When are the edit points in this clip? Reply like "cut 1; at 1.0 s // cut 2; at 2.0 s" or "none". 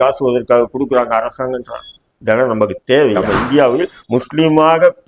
cut 1; at 3.2 s